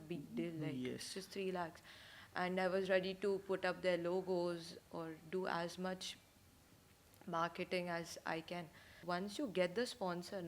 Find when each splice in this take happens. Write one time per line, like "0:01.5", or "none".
0:09.0